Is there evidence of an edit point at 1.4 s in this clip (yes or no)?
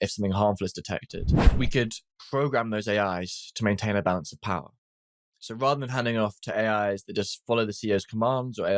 yes